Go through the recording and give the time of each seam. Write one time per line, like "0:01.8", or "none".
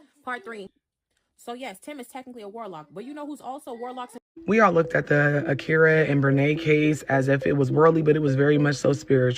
0:04.2